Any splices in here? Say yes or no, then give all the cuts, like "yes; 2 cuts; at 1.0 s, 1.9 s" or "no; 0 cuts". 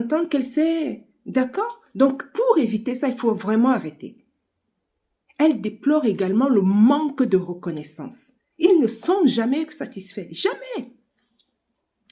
no; 0 cuts